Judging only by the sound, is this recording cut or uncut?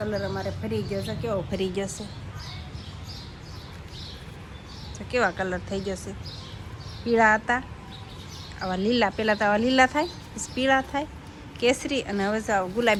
uncut